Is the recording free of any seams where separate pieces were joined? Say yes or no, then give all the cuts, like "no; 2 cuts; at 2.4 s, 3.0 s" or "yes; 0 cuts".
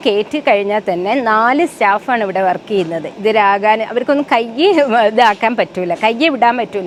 yes; 0 cuts